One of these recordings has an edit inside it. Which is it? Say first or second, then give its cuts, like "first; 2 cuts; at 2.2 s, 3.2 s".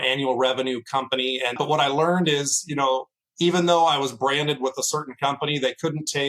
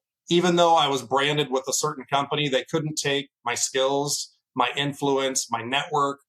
first; 1 cut; at 1.6 s